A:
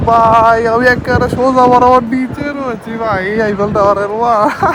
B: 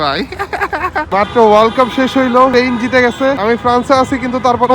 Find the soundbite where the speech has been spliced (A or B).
B